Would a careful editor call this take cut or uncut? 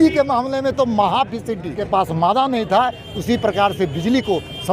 cut